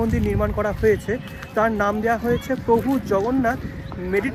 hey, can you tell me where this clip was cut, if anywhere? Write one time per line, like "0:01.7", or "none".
none